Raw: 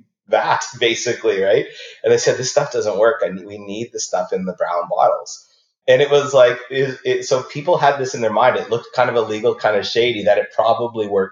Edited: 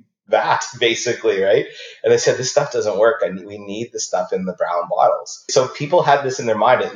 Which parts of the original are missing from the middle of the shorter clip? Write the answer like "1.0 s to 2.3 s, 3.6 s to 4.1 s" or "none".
5.5 s to 7.2 s